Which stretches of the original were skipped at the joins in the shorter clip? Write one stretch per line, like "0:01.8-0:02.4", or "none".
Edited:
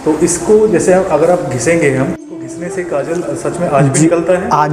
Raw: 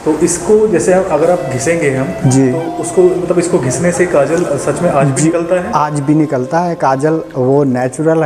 0:02.2-0:03.4